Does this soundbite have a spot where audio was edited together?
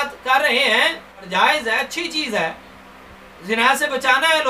yes; 1 cut; at 1.1 s

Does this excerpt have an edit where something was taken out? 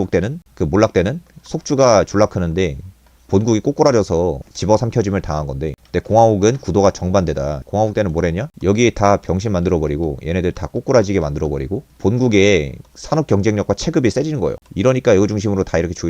yes; 3 cuts; at 4.5 s, 7.6 s, 11.9 s

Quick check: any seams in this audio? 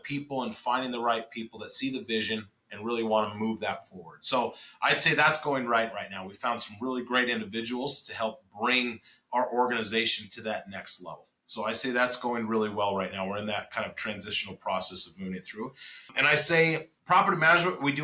yes; 2 cuts; at 16.1 s, 16.9 s

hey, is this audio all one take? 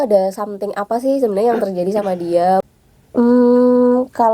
no; 1 cut; at 2.6 s

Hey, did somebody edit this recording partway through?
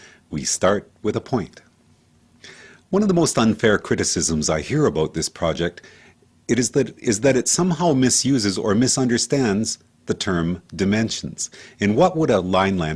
no; 0 cuts

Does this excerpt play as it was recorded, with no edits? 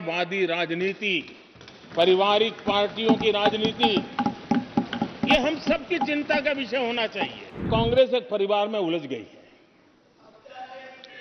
no; 1 cut; at 7.6 s

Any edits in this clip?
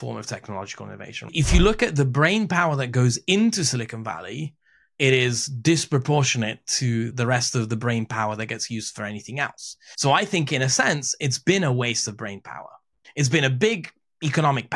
yes; 2 cuts; at 1.3 s, 13.0 s

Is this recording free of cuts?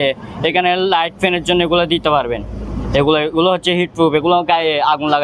yes; 0 cuts

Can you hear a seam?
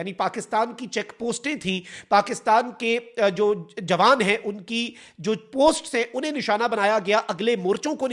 no; 0 cuts

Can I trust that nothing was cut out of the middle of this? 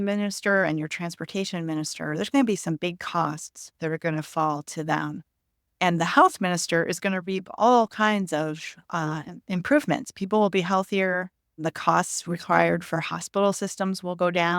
yes; 0 cuts

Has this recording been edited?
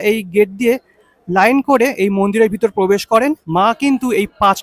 yes; 2 cuts; at 0.9 s, 3.4 s

